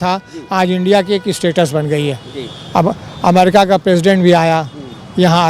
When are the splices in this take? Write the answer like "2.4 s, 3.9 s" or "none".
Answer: none

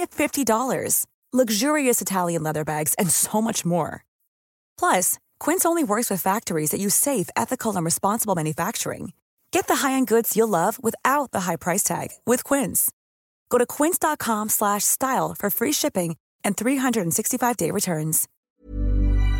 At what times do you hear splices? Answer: 18.4 s

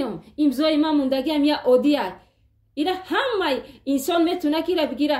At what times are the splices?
none

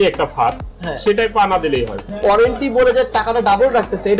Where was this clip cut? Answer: 2.0 s

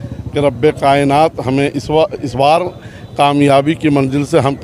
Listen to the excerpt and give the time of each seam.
none

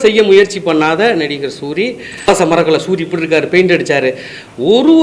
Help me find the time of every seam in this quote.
2.3 s

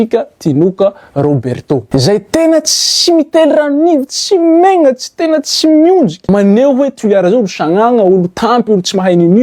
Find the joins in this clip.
1.8 s, 6.2 s

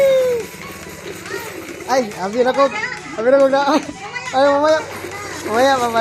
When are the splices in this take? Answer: none

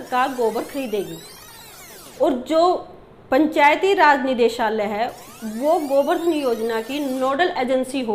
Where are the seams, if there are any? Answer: none

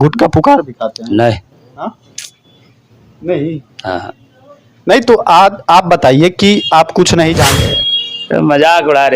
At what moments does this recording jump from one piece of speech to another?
7.5 s

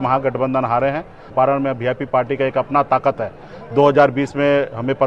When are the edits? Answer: 1.2 s

